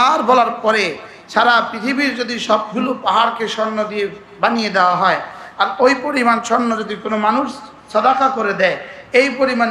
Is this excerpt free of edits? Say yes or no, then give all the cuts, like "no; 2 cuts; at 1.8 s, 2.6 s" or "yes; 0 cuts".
yes; 0 cuts